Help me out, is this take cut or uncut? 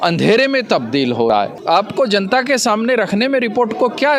cut